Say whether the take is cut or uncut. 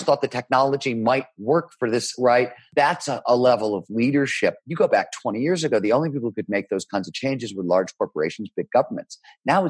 cut